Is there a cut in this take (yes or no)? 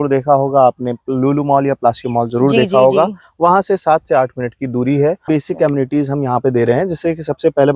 yes